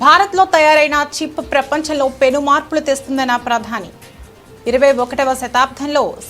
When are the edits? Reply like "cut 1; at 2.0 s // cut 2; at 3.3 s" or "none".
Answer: none